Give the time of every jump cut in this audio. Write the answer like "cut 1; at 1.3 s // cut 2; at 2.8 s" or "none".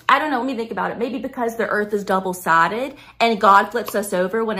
none